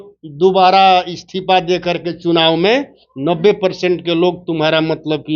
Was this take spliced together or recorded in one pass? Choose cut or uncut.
uncut